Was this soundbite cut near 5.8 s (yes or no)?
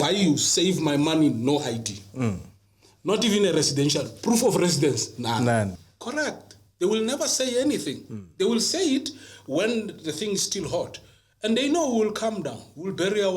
yes